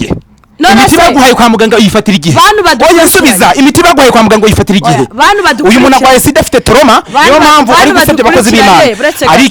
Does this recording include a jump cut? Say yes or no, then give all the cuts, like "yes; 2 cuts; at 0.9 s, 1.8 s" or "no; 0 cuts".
no; 0 cuts